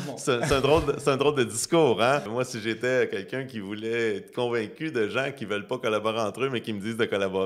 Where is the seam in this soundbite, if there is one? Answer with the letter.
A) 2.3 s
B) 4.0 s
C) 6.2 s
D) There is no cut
A